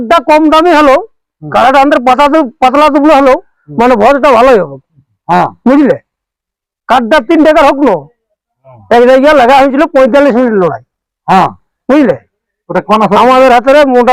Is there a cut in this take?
no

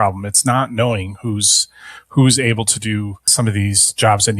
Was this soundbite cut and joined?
yes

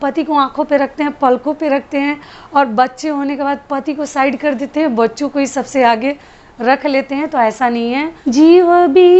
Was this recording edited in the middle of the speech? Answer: yes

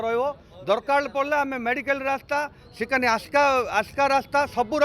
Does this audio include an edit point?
no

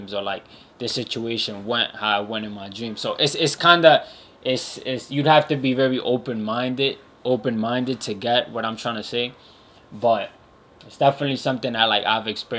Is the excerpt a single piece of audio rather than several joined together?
yes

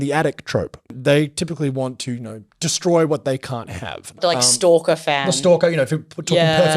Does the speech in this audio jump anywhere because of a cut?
yes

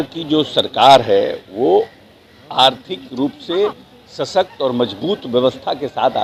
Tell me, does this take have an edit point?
no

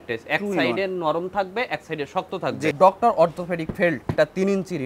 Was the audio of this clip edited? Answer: yes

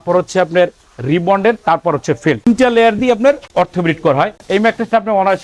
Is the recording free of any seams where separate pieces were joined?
no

